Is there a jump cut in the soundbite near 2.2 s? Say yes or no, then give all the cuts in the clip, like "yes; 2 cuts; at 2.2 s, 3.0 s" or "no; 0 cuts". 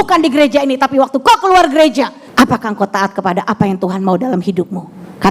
yes; 1 cut; at 2.2 s